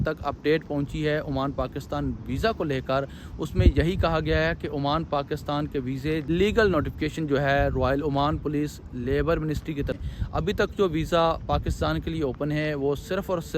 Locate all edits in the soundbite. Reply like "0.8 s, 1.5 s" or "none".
6.3 s, 10.0 s